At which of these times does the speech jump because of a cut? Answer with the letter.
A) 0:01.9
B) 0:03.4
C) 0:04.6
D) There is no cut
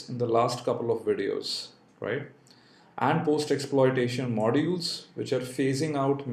A